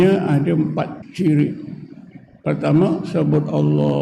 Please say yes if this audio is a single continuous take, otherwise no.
no